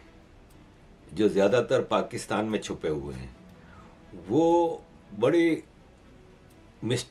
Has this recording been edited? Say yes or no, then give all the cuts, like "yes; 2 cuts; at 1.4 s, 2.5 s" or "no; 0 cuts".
no; 0 cuts